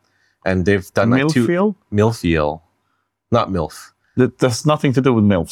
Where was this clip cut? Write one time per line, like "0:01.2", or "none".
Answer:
none